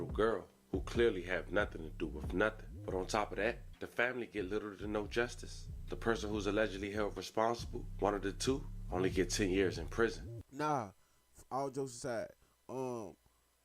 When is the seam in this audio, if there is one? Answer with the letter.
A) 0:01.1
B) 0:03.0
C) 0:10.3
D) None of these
C